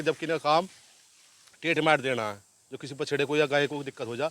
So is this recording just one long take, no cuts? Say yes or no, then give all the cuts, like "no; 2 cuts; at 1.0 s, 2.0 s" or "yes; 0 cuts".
yes; 0 cuts